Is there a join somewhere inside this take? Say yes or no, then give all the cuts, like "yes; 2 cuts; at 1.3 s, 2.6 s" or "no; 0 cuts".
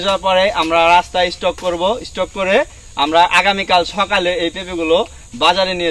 no; 0 cuts